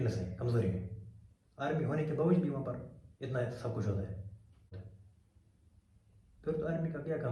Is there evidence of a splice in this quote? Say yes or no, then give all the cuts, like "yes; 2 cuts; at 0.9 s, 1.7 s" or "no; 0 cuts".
yes; 1 cut; at 4.8 s